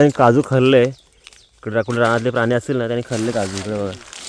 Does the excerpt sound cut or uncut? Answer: uncut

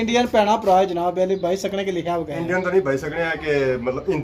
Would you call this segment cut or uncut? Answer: uncut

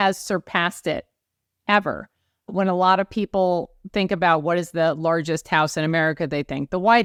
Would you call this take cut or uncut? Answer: uncut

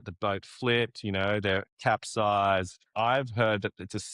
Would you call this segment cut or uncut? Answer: cut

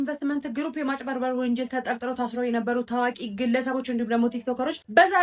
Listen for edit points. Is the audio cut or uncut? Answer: uncut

